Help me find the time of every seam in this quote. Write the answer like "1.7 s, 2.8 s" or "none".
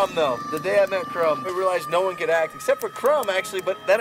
1.5 s